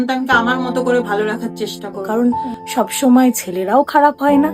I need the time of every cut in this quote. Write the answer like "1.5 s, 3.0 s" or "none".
2.0 s